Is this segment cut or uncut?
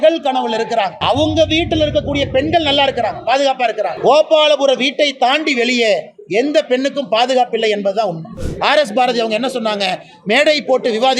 cut